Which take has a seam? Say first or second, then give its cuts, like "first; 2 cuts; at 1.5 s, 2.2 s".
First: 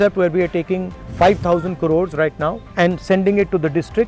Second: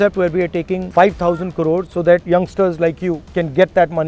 second; 3 cuts; at 0.8 s, 2.1 s, 3.2 s